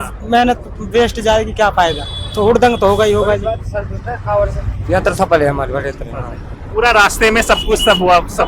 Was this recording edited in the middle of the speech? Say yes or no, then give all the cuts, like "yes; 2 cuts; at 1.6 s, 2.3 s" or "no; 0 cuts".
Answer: no; 0 cuts